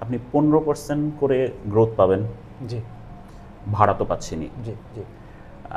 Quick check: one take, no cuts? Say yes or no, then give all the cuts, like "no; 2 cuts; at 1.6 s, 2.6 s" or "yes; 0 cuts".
yes; 0 cuts